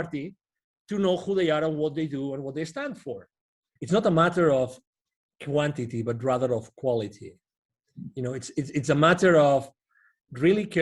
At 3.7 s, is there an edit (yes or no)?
yes